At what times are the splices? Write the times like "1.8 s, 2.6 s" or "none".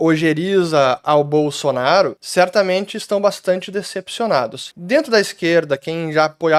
none